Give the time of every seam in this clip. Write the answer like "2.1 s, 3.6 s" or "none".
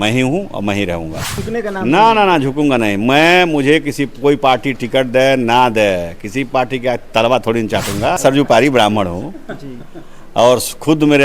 1.2 s, 8.2 s